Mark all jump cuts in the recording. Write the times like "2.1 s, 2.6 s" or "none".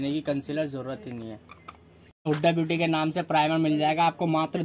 2.4 s